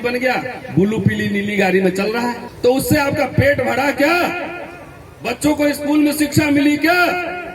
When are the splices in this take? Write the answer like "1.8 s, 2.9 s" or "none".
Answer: 2.5 s